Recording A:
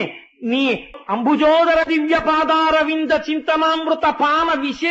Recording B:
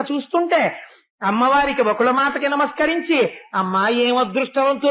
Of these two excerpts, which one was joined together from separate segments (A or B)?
A